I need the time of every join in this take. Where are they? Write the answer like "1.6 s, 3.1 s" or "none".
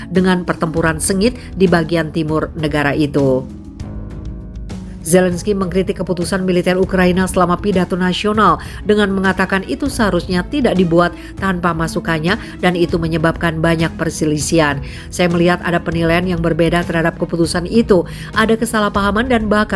3.4 s, 5.0 s